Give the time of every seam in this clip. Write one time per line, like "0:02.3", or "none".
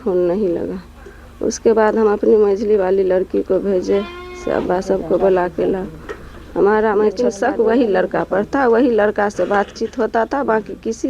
0:07.2